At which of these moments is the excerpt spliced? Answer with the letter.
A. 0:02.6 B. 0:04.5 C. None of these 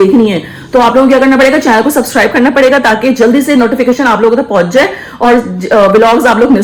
C